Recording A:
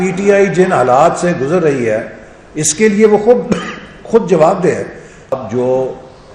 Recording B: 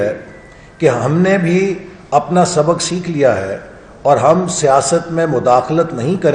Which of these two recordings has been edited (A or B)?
A